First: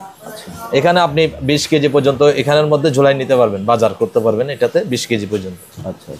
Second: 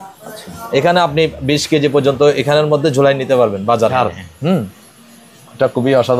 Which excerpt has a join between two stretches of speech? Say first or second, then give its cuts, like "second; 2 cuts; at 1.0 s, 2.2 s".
second; 1 cut; at 3.9 s